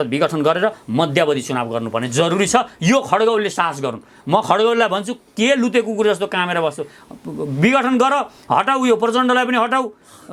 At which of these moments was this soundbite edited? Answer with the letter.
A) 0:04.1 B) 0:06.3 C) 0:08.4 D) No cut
D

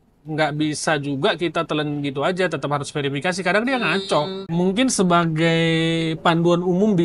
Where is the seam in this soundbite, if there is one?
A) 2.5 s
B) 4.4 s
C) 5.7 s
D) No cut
B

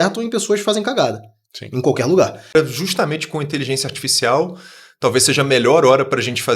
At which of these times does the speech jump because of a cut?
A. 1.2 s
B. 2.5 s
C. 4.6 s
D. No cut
B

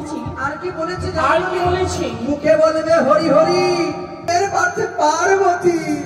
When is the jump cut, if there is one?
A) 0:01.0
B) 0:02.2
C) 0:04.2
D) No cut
C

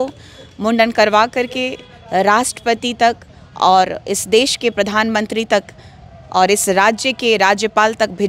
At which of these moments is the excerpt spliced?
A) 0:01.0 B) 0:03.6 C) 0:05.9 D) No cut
D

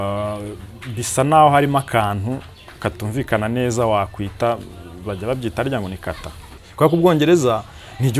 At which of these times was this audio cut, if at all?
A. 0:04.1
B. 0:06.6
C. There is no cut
B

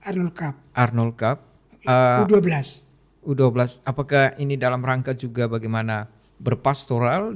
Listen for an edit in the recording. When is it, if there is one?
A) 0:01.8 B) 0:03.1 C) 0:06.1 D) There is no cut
D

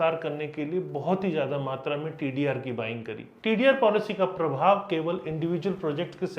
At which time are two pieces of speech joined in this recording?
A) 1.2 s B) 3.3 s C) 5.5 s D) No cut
B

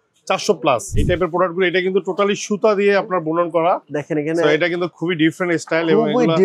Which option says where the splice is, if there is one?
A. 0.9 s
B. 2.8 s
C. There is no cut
A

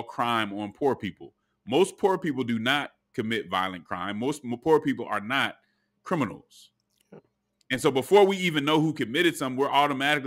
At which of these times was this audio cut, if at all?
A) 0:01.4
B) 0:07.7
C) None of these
C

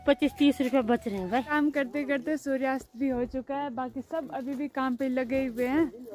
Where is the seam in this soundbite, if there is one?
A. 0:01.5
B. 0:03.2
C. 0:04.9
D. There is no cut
A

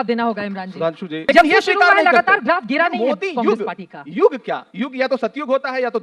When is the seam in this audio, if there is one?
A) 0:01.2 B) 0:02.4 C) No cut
A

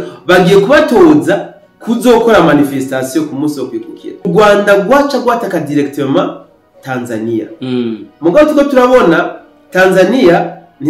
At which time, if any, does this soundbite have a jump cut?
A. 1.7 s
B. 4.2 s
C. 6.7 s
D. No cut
B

